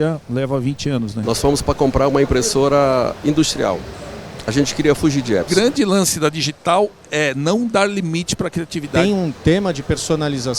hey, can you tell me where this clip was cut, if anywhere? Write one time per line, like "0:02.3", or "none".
0:01.2
0:05.5
0:08.9